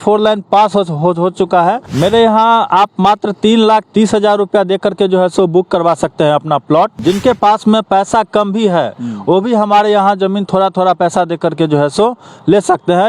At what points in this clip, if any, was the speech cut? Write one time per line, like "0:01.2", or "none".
0:01.9
0:07.0

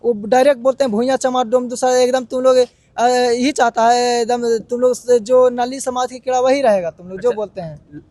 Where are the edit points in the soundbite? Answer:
none

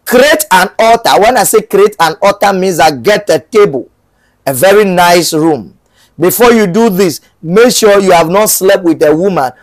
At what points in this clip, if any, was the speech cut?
none

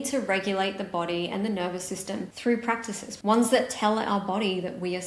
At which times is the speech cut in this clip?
0:02.3
0:03.1

